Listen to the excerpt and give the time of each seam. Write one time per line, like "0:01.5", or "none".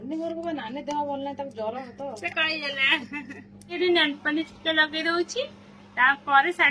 0:03.8